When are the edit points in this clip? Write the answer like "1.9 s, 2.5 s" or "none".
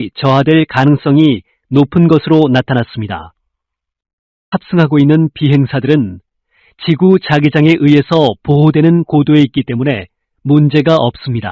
4.5 s